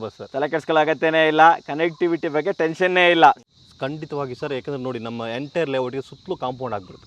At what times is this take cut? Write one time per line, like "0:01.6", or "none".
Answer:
0:03.4